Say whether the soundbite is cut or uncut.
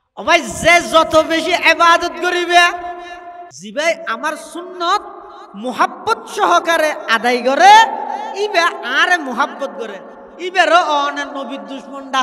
cut